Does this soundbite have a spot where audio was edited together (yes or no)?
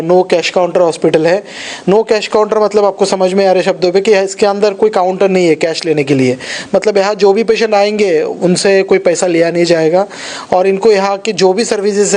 no